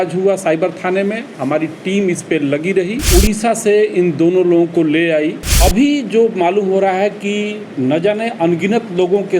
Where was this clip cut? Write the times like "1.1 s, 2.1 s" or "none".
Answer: 3.0 s, 5.4 s